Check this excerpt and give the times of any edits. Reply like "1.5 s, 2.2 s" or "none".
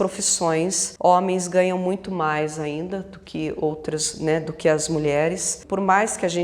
0.8 s, 5.5 s

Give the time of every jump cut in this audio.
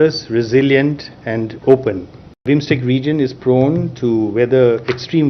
2.4 s

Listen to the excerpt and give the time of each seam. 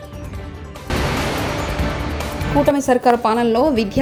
none

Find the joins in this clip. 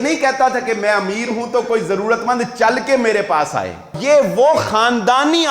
3.9 s

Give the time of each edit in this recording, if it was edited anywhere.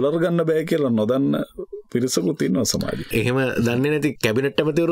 3.1 s

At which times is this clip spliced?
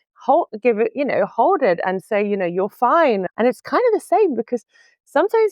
3.2 s

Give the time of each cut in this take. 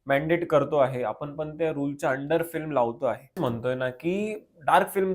3.4 s

